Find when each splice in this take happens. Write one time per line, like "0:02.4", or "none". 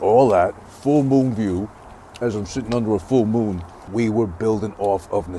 0:03.8